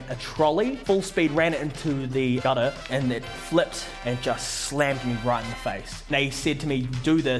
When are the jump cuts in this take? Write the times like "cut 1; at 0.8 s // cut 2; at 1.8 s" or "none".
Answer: cut 1; at 0.8 s // cut 2; at 2.4 s // cut 3; at 3.9 s // cut 4; at 6.1 s